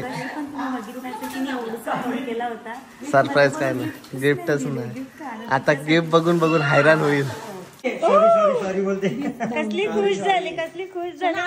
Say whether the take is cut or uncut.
cut